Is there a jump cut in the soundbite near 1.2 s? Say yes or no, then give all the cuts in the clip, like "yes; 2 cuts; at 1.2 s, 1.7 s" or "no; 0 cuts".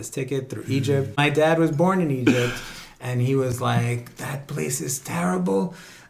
yes; 1 cut; at 1.2 s